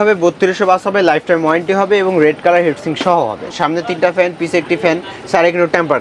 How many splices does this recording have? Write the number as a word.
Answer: one